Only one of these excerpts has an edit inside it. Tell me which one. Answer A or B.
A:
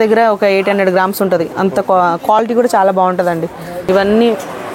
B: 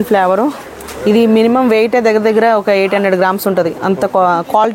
A